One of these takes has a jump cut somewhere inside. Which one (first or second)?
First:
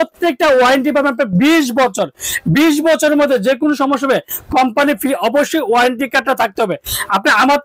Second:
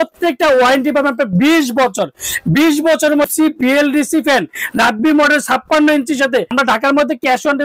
second